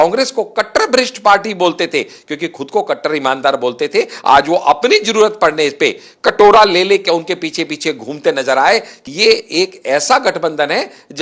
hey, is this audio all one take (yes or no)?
no